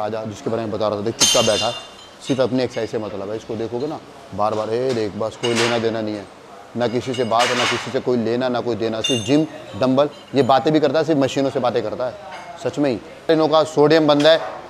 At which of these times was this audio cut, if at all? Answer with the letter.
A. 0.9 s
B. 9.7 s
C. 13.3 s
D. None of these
C